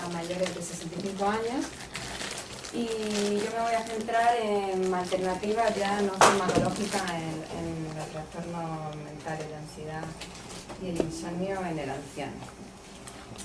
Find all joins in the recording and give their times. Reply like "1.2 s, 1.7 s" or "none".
5.8 s